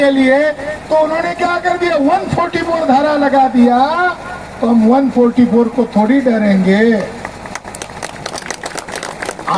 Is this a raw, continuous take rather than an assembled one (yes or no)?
yes